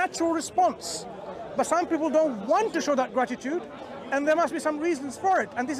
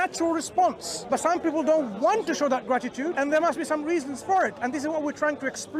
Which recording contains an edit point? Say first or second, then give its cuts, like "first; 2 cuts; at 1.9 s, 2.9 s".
second; 2 cuts; at 0.9 s, 3.1 s